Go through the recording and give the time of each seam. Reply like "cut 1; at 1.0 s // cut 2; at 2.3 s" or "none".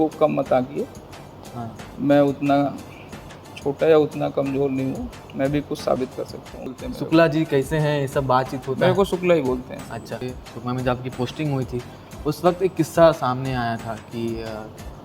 cut 1; at 6.7 s // cut 2; at 10.3 s